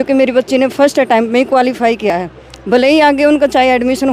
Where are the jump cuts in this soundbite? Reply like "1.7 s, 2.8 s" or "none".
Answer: none